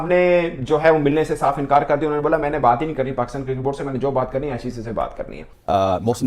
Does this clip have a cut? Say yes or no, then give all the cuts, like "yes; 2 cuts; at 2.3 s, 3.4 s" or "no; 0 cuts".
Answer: yes; 1 cut; at 5.4 s